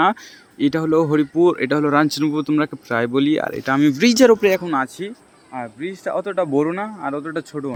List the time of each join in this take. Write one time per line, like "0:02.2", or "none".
none